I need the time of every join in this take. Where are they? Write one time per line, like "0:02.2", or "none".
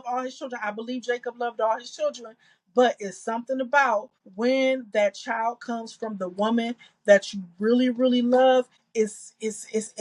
0:04.2
0:08.8

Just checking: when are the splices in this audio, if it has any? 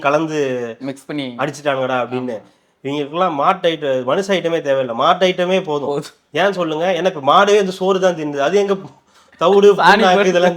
none

